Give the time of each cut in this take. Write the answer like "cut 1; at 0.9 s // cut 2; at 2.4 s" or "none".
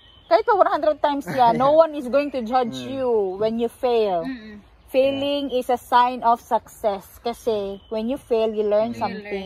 none